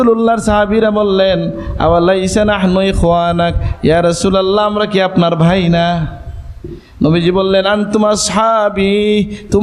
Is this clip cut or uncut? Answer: uncut